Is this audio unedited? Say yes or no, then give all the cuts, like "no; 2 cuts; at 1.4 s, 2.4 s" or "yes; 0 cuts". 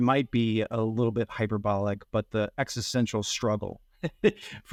yes; 0 cuts